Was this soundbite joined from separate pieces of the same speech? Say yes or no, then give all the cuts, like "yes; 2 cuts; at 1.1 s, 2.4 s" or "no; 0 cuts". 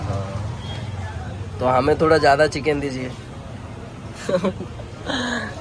no; 0 cuts